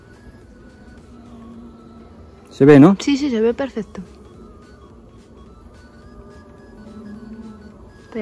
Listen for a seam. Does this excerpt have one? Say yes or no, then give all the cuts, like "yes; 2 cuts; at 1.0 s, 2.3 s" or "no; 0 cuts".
no; 0 cuts